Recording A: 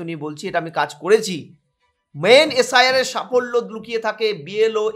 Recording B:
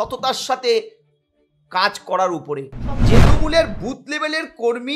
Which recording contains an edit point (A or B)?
B